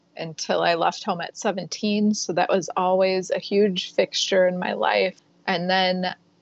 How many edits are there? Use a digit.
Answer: 1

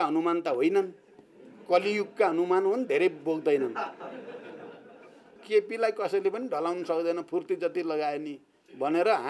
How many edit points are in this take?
1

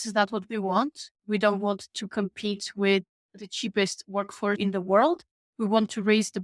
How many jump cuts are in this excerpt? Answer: 1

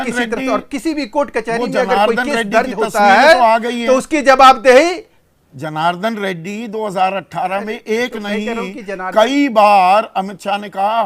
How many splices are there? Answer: 0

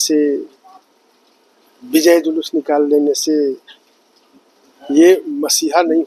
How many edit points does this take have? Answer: 0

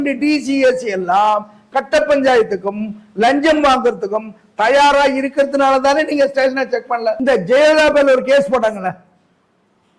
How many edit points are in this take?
1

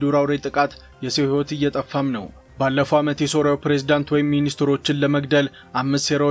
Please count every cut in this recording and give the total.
1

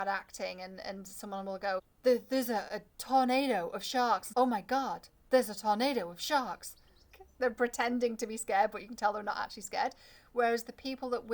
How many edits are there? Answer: 3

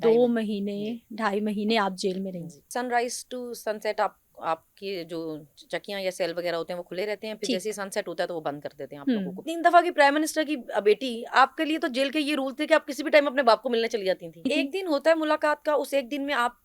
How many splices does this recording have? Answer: 3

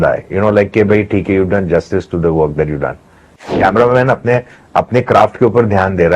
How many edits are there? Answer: 1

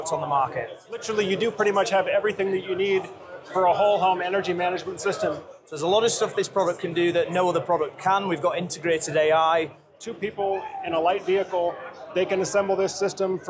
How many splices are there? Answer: 3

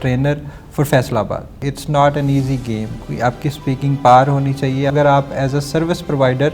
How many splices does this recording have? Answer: 3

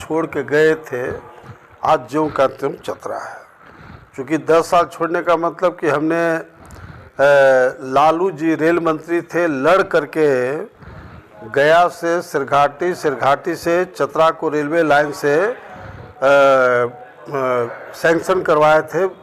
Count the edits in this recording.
0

